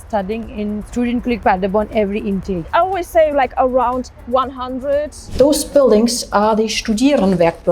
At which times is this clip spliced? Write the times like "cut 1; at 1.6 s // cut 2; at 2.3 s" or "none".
cut 1; at 2.7 s // cut 2; at 5.2 s